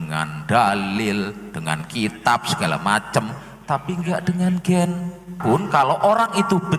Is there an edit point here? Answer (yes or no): yes